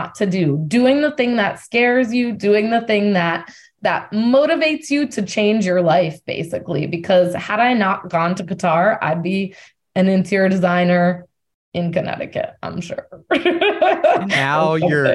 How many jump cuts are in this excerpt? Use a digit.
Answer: 1